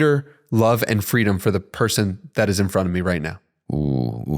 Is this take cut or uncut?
uncut